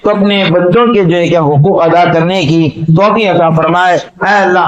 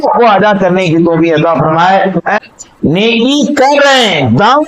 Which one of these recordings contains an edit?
second; 1 cut; at 2.4 s

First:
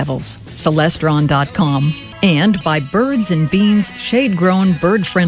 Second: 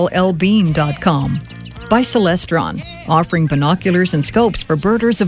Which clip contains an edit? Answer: first; 1 cut; at 2.0 s

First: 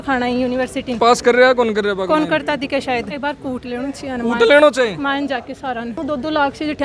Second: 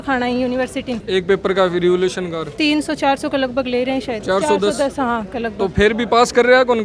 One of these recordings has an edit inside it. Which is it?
first; 3 cuts; at 1.0 s, 3.1 s, 6.0 s

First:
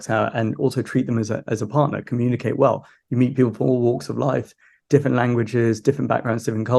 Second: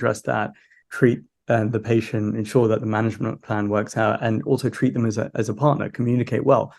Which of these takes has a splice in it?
second; 1 cut; at 1.1 s

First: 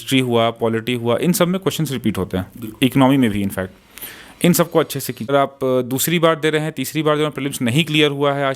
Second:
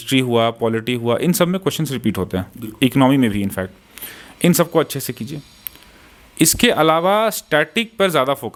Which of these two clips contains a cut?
first; 1 cut; at 5.3 s

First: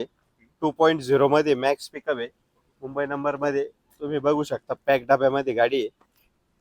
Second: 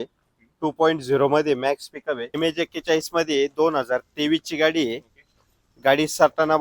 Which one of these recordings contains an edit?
second; 1 cut; at 2.4 s

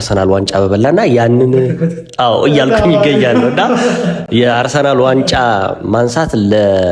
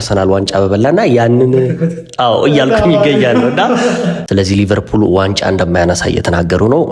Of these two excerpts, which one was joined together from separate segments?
second; 1 cut; at 4.2 s

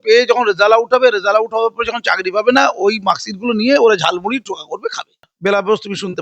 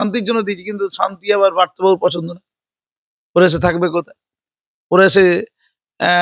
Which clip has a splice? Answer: first; 1 cut; at 5.2 s

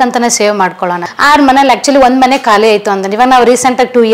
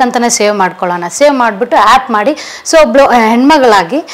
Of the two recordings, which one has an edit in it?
first; 1 cut; at 1.0 s

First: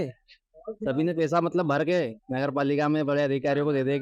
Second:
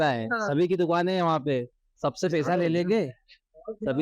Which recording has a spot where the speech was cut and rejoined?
second; 1 cut; at 1.8 s

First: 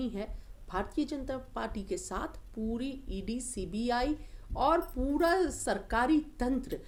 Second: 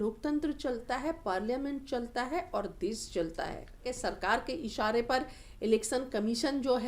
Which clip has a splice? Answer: second; 1 cut; at 3.9 s

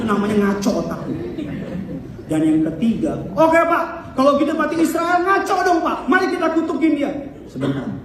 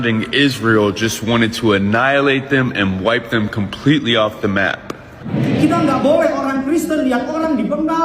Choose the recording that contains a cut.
second; 1 cut; at 5.2 s

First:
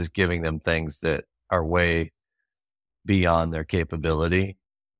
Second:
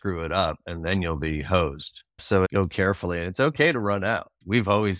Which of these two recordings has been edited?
second; 1 cut; at 2.4 s

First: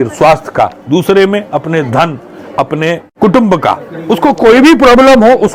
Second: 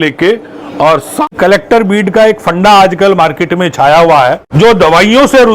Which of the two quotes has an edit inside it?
second; 2 cuts; at 1.2 s, 4.4 s

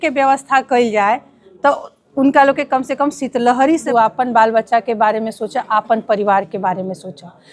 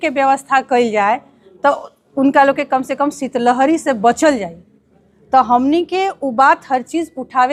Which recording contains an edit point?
first; 1 cut; at 3.8 s

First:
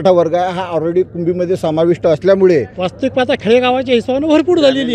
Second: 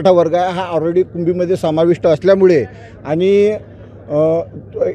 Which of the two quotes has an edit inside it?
first; 1 cut; at 2.8 s

